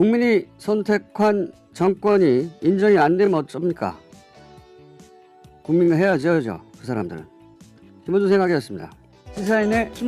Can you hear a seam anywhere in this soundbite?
yes; 1 cut; at 8.8 s

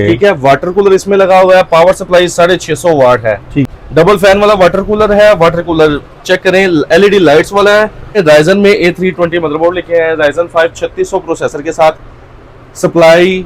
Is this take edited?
yes; 2 cuts; at 3.7 s, 8.2 s

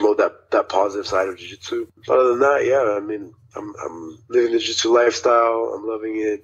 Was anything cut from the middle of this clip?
yes; 1 cut; at 2.0 s

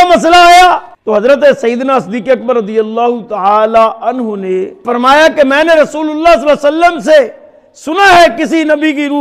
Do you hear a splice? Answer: yes; 2 cuts; at 0.9 s, 4.8 s

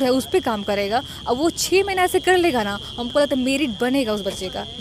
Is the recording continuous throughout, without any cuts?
yes; 0 cuts

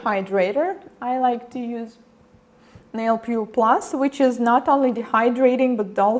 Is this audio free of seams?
no; 1 cut; at 4.0 s

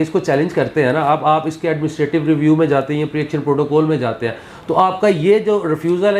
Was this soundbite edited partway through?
no; 0 cuts

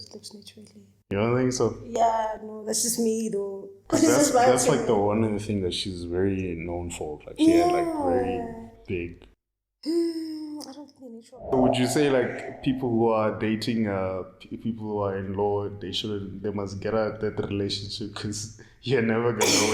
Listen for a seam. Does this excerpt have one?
yes; 1 cut; at 11.5 s

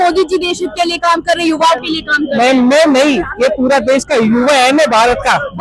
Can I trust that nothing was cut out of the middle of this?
yes; 0 cuts

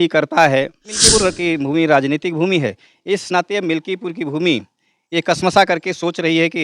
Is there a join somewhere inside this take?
yes; 1 cut; at 1.0 s

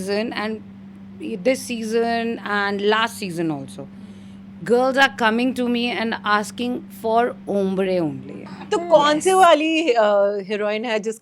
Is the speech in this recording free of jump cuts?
no; 1 cut; at 8.6 s

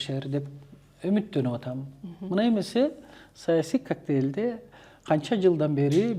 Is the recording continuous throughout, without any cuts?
yes; 0 cuts

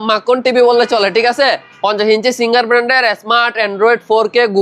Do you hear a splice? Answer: no; 0 cuts

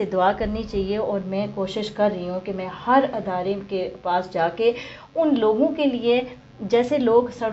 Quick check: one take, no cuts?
yes; 0 cuts

